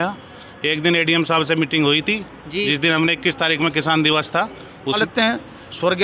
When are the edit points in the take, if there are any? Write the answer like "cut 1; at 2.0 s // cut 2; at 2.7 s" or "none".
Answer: cut 1; at 5.0 s